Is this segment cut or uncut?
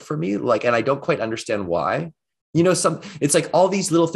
uncut